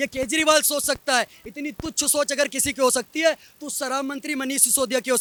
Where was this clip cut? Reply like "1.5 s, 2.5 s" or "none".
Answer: none